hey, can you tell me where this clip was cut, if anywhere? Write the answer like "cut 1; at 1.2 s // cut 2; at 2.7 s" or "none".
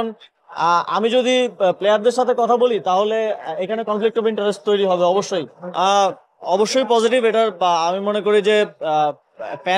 cut 1; at 5.6 s